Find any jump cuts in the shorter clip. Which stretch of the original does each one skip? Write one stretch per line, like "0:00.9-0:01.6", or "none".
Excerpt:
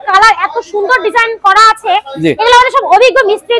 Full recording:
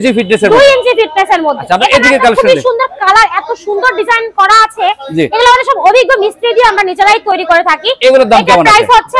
none